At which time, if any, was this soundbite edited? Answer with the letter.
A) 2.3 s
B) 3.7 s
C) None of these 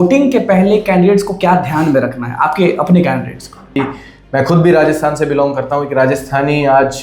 B